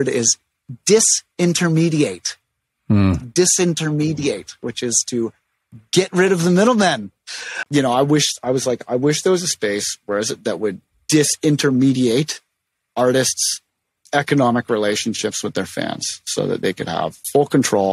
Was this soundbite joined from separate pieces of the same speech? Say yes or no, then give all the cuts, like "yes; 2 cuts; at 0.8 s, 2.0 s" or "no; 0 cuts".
yes; 1 cut; at 7.5 s